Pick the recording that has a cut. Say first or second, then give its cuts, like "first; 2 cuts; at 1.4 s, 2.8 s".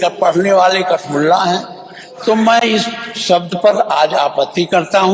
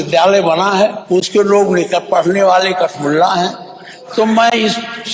second; 1 cut; at 1.0 s